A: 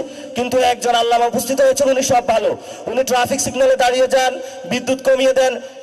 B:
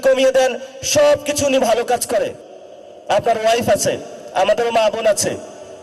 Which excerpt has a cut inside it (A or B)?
B